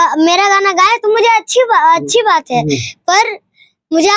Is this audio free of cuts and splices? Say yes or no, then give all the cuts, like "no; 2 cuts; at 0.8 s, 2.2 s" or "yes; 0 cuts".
yes; 0 cuts